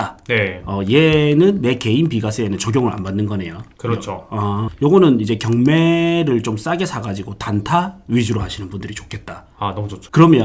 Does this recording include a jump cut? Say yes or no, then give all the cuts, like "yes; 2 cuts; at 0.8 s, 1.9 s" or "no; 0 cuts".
yes; 1 cut; at 4.7 s